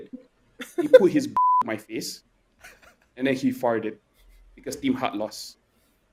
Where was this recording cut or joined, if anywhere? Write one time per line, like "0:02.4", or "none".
none